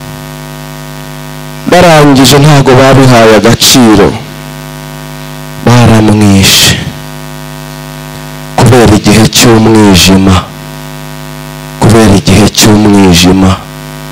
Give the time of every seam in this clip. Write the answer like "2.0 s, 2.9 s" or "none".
none